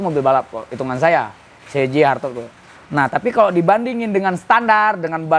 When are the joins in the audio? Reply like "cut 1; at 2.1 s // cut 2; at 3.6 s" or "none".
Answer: none